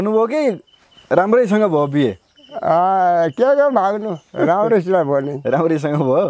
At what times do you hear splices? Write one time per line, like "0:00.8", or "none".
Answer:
none